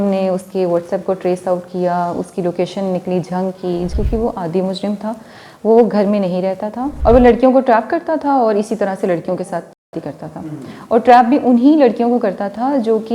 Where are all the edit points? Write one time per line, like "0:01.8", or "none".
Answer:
0:03.9
0:06.9